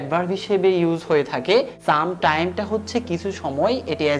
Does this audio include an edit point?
yes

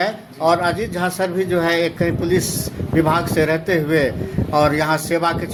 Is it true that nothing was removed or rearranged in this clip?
yes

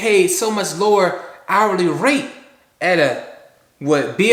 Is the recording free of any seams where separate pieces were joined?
yes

